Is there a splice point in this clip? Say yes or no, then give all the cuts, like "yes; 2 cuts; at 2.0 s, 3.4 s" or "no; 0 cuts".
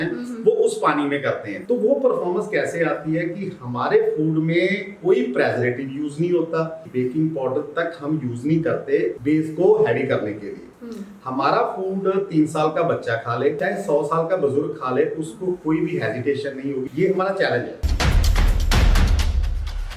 yes; 6 cuts; at 1.5 s, 6.8 s, 9.2 s, 13.6 s, 16.8 s, 17.9 s